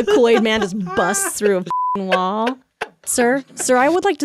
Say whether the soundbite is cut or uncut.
cut